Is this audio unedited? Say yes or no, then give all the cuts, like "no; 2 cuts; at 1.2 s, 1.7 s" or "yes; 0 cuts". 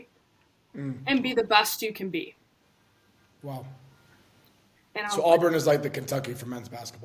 yes; 0 cuts